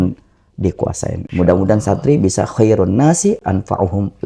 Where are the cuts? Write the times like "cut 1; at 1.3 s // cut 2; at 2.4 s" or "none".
cut 1; at 1.2 s